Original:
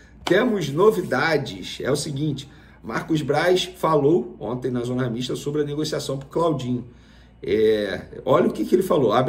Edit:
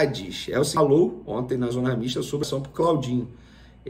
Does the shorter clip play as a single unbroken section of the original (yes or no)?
no